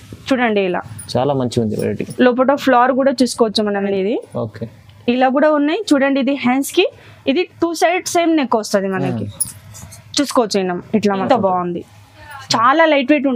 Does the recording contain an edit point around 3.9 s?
yes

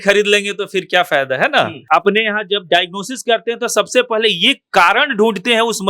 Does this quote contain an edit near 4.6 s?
no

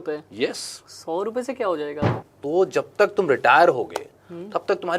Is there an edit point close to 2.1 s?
yes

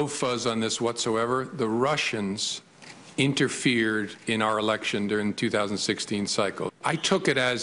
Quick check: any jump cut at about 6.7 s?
yes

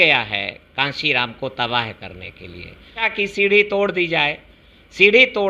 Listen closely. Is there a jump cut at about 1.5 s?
no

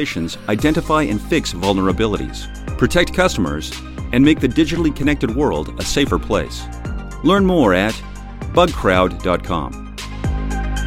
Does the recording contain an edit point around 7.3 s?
no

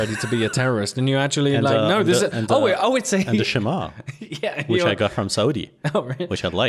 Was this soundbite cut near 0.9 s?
no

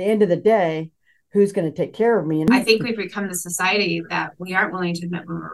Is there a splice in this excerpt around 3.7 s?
no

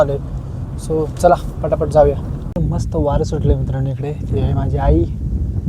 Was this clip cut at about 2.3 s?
yes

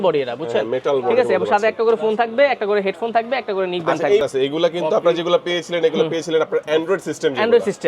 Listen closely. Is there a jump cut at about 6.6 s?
no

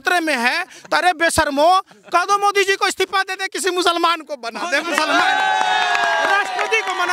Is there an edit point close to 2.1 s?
no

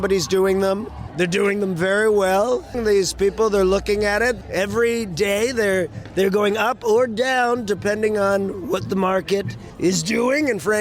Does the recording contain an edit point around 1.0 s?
yes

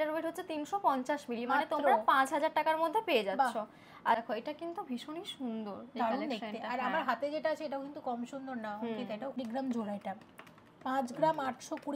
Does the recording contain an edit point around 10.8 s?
no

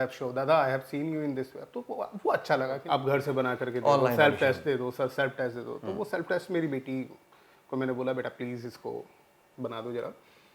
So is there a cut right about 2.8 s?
yes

